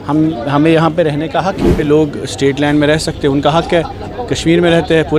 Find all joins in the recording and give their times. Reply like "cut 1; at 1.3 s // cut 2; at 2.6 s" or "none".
cut 1; at 1.7 s